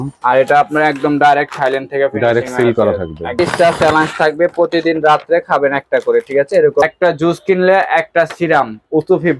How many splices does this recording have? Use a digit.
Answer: 2